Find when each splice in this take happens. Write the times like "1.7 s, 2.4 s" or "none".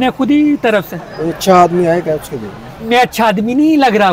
1.0 s, 2.8 s